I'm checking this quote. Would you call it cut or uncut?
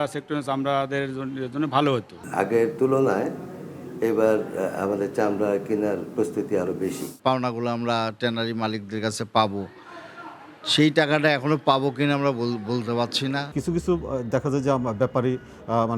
cut